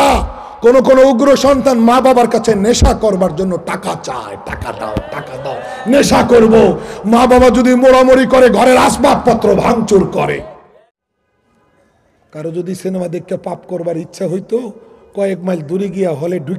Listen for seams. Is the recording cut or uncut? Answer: cut